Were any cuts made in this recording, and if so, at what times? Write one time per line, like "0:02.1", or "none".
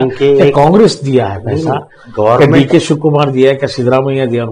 none

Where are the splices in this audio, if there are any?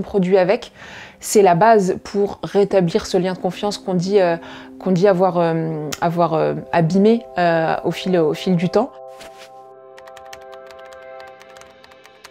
0:08.9

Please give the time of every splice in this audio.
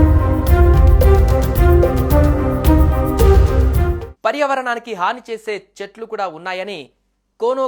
0:02.0

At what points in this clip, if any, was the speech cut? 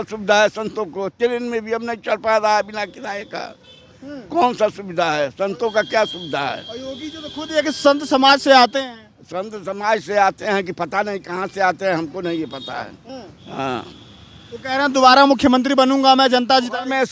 none

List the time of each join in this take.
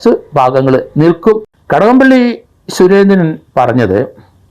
0:01.4

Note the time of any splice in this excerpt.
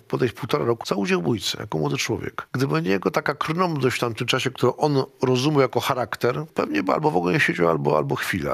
0:00.8
0:02.4
0:06.5

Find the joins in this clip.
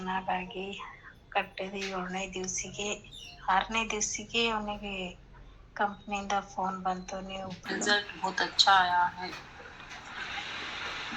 0:07.6

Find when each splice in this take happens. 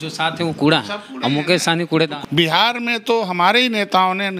0:02.2

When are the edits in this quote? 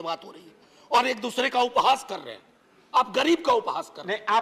none

